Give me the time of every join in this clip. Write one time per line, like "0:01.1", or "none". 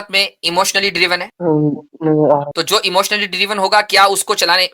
0:01.3
0:02.5